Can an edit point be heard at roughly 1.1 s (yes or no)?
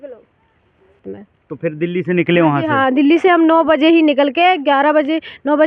yes